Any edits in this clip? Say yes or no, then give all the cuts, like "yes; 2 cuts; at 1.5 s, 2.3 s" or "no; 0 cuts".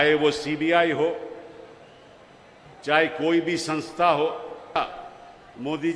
yes; 1 cut; at 4.8 s